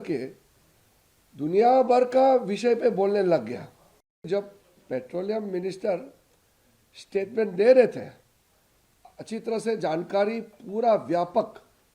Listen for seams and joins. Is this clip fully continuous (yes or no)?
no